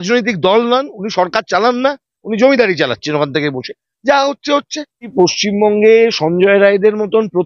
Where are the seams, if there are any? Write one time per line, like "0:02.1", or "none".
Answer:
0:05.0